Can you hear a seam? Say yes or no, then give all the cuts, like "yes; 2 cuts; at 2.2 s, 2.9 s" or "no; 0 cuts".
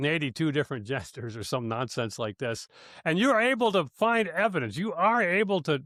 no; 0 cuts